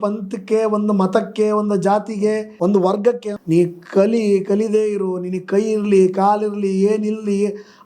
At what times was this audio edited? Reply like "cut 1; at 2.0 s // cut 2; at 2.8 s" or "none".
cut 1; at 2.5 s // cut 2; at 3.3 s